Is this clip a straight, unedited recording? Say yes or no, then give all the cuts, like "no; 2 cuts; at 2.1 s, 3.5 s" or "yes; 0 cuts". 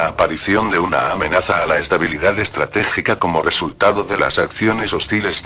yes; 0 cuts